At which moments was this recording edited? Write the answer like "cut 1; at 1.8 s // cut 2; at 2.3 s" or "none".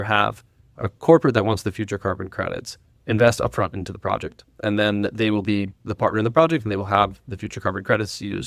none